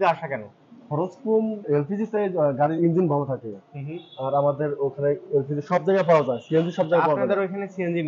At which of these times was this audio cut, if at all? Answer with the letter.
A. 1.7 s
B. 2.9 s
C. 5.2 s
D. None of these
A